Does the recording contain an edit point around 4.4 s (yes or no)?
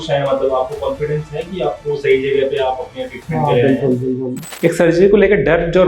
yes